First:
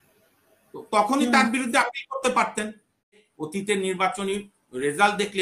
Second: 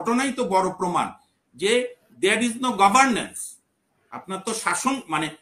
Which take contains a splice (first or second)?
first